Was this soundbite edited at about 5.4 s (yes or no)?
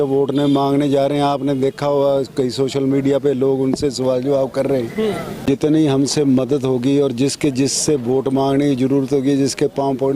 yes